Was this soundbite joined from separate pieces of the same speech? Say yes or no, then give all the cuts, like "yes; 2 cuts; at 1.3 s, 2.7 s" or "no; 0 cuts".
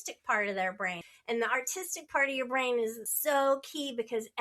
yes; 2 cuts; at 1.0 s, 3.1 s